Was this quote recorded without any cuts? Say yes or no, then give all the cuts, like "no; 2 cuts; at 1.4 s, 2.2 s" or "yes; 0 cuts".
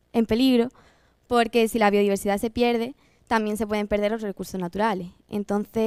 yes; 0 cuts